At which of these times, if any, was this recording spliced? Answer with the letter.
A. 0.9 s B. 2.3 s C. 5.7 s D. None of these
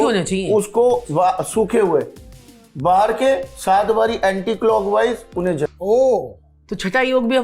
C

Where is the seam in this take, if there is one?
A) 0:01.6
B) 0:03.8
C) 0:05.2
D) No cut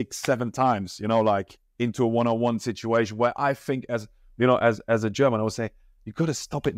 D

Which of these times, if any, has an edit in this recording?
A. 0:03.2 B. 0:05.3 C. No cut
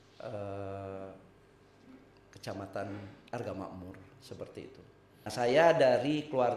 B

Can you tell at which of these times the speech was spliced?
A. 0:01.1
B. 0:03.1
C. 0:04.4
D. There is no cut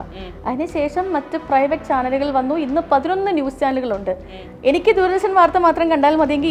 D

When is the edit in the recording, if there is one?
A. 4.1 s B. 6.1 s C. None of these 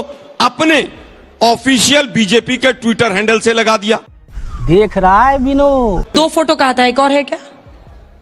B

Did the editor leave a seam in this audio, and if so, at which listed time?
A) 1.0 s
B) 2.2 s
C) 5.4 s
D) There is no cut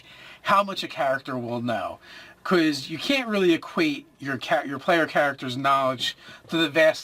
C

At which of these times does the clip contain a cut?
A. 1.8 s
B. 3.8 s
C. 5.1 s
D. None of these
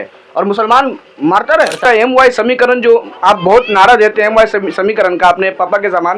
A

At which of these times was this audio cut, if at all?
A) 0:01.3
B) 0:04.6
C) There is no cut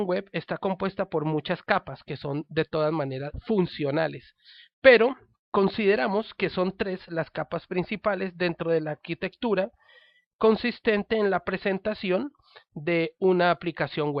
A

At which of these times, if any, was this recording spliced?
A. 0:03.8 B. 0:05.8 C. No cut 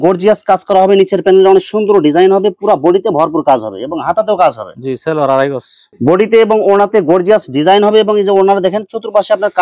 C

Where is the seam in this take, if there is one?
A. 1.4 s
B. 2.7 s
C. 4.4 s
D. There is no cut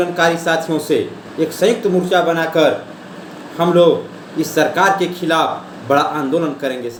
D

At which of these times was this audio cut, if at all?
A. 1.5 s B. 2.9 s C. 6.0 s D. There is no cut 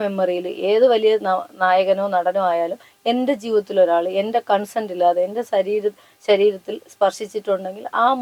D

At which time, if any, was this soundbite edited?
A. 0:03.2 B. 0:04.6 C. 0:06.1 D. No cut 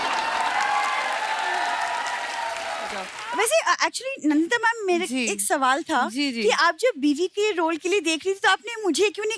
A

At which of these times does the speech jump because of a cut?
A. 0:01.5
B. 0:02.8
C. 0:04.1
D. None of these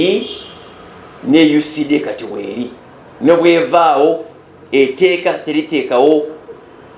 D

